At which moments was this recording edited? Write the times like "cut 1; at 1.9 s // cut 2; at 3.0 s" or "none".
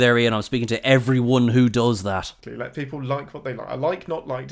cut 1; at 2.4 s